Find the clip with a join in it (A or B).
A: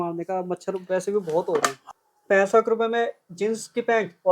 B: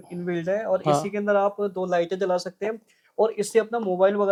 A